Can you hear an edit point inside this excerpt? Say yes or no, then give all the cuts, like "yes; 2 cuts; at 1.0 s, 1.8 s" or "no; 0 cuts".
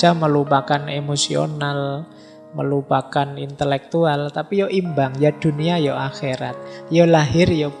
no; 0 cuts